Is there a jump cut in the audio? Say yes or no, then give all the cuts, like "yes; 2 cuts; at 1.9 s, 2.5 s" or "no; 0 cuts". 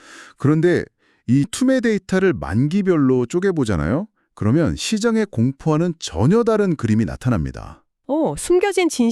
yes; 1 cut; at 1.5 s